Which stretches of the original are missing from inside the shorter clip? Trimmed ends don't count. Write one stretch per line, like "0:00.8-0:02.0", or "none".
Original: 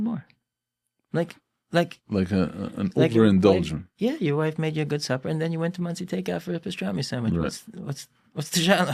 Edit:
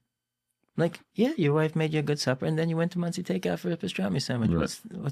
0:01.4-0:03.9